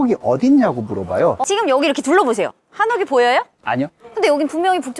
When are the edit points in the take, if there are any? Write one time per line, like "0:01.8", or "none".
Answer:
0:01.4
0:04.0